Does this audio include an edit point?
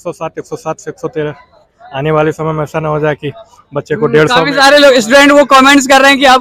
no; 0 cuts

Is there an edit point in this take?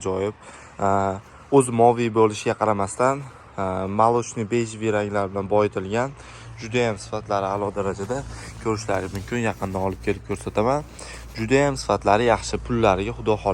no; 0 cuts

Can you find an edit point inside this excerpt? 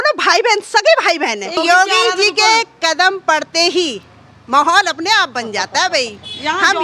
yes; 1 cut; at 1.6 s

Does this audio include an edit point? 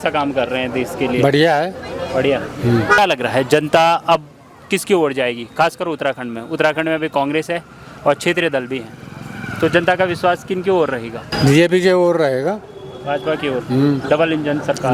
yes; 2 cuts; at 3.0 s, 11.3 s

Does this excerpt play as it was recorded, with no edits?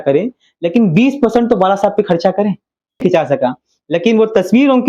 no; 1 cut; at 3.0 s

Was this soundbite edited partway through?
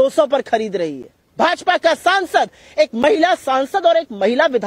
yes; 1 cut; at 1.2 s

